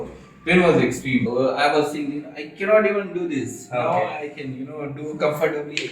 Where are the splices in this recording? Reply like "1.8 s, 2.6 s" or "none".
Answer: 1.3 s